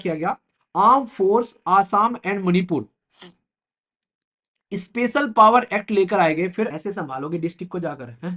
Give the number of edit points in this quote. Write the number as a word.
one